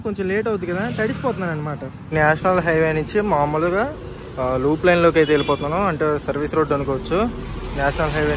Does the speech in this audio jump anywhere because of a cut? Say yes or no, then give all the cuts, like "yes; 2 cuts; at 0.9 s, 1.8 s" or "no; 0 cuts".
yes; 1 cut; at 2.1 s